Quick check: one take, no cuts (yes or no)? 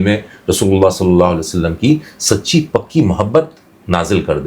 yes